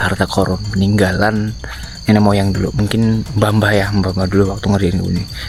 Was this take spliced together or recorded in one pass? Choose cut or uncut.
uncut